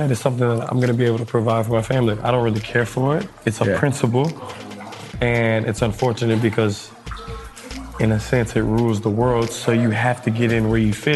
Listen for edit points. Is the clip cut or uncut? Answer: uncut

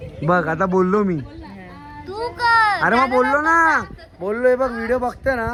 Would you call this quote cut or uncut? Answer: uncut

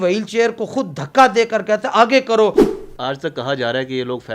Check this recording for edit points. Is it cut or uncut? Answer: cut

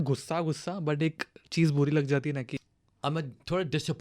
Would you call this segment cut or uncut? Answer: cut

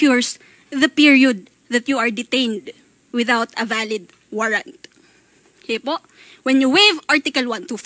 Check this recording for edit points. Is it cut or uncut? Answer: uncut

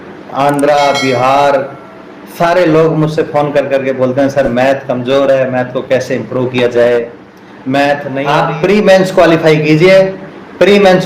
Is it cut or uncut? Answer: cut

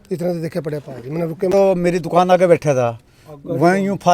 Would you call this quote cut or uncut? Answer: cut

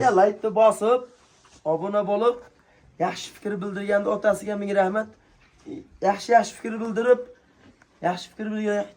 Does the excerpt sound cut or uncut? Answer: uncut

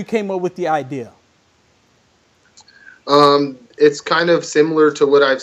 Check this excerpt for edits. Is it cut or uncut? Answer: uncut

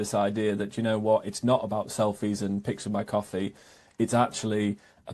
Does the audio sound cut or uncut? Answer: uncut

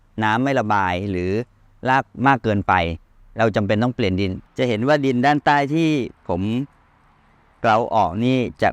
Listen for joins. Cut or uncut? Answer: cut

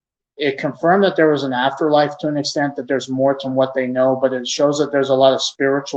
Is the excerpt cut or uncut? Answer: uncut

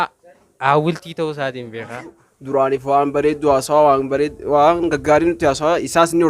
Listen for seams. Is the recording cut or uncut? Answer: cut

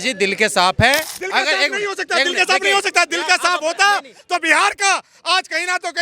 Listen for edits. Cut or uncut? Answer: cut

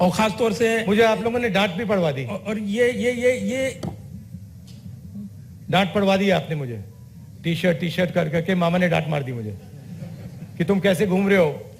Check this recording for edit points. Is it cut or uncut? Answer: uncut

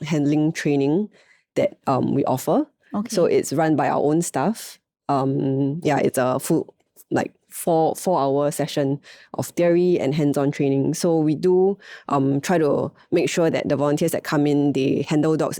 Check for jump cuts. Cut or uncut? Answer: uncut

